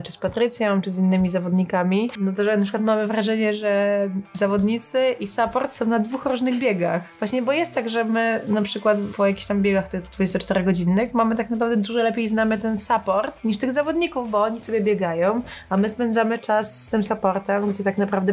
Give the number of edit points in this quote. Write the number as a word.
three